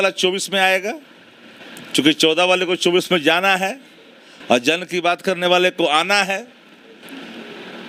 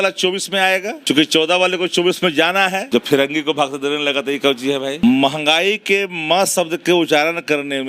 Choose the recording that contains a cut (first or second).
second